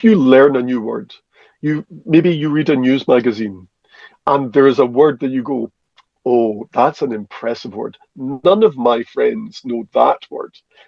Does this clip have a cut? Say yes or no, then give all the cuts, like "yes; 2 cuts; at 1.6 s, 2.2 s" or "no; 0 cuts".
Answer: no; 0 cuts